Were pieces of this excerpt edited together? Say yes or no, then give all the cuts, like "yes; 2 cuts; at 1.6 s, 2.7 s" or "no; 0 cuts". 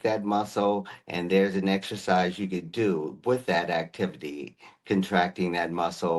no; 0 cuts